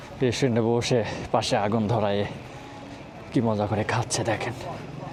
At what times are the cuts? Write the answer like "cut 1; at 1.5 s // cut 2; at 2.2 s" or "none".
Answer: none